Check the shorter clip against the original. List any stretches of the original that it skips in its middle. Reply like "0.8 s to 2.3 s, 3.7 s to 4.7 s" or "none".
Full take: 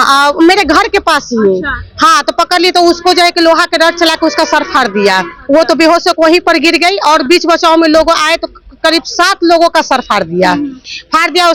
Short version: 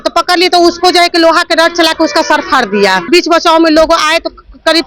5.3 s to 7.2 s